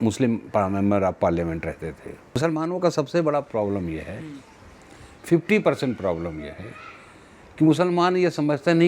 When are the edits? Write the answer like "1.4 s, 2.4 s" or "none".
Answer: 2.4 s

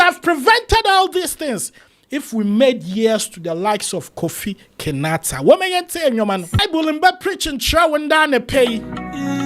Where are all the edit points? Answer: 6.6 s

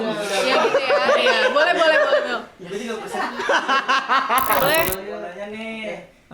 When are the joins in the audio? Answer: 4.6 s

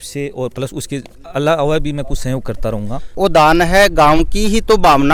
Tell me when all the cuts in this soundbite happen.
none

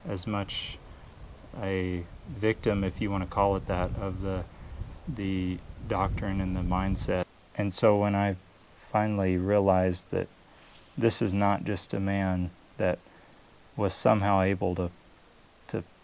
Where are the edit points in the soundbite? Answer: 7.4 s

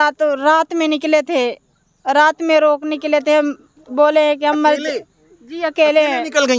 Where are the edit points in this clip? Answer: none

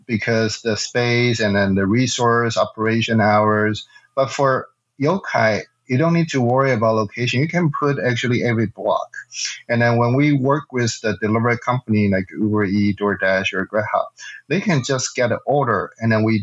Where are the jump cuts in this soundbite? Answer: none

